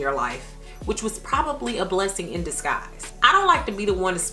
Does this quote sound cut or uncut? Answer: uncut